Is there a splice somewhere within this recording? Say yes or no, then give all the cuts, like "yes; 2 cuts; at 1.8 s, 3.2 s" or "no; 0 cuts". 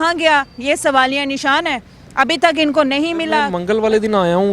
yes; 1 cut; at 3.5 s